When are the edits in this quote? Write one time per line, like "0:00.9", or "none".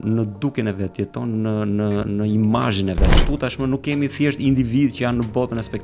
0:03.2